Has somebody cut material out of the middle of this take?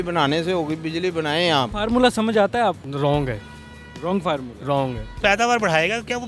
yes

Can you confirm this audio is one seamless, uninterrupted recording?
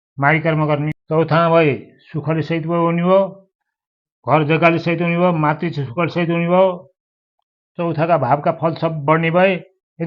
no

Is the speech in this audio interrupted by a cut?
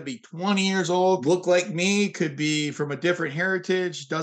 yes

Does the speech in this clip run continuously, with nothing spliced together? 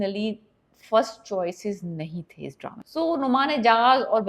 no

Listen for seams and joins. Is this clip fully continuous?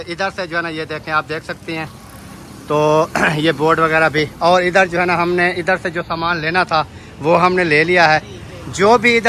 yes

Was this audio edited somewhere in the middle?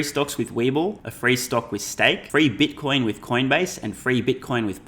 yes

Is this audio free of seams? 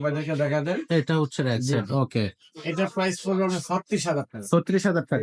yes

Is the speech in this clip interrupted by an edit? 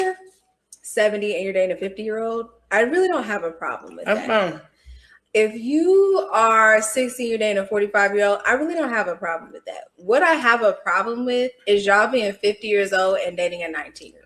no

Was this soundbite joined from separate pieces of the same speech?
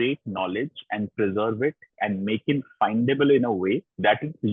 no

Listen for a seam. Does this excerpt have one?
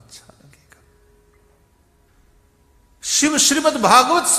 yes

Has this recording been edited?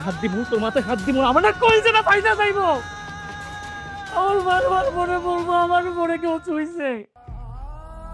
yes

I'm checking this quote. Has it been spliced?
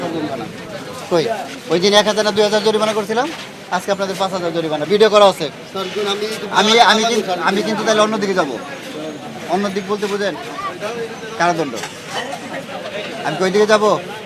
no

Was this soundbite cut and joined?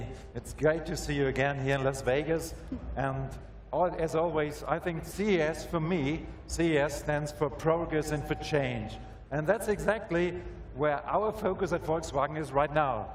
yes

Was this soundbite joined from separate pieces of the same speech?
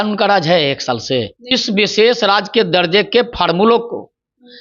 yes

